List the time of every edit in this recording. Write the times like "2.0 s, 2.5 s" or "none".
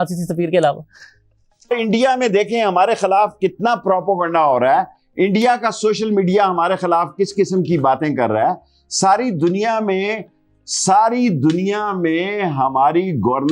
1.7 s